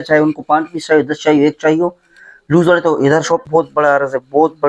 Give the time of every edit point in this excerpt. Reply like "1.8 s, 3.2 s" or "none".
3.4 s